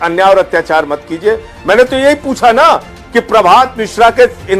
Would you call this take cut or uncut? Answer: uncut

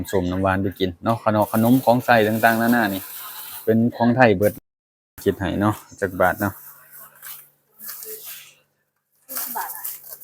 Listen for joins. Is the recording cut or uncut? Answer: cut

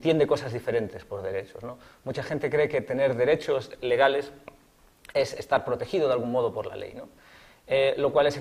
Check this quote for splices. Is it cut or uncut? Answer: uncut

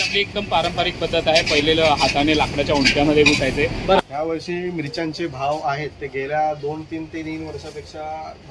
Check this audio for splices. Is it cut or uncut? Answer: cut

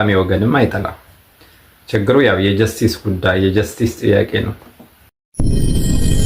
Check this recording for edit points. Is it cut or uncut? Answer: cut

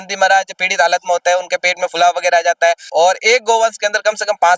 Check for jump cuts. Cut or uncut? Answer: cut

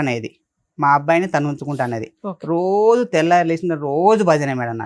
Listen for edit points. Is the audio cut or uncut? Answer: uncut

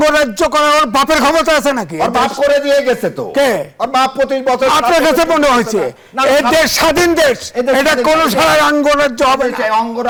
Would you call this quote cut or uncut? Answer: uncut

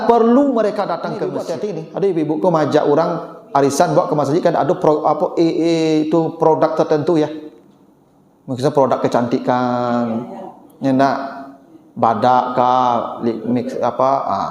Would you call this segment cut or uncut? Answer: cut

